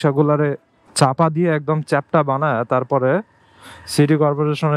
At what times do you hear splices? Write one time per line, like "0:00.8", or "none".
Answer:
none